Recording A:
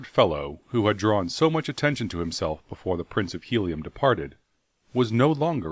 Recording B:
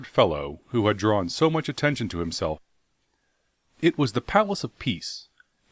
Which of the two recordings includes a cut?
A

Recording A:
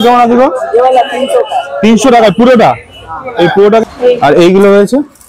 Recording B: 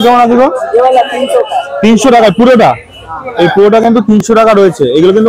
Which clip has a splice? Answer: A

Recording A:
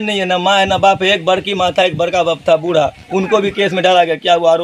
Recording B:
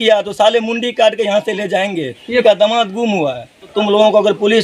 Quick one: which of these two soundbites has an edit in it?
B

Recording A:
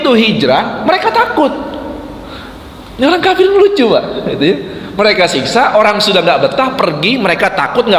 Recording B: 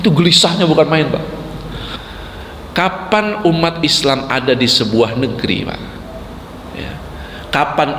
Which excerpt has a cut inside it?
B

